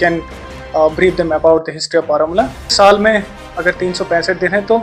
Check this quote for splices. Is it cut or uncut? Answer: cut